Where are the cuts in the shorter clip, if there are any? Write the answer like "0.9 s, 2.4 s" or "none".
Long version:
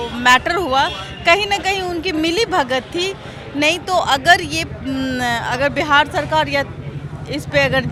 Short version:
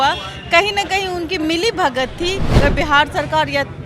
2.6 s